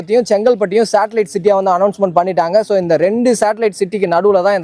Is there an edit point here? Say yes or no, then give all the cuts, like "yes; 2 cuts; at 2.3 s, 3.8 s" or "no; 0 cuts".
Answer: no; 0 cuts